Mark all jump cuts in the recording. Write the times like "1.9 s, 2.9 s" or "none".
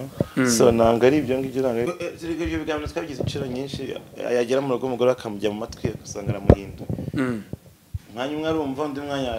1.9 s